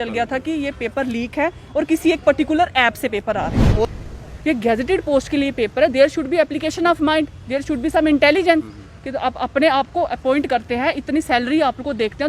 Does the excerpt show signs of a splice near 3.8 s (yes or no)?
yes